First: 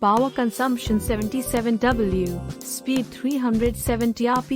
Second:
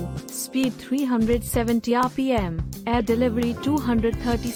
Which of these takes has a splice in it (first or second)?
first